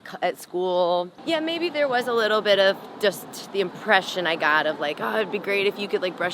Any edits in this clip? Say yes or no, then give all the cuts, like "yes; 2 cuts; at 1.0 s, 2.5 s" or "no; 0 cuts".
yes; 1 cut; at 1.2 s